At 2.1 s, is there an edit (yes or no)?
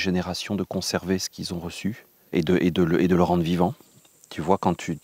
yes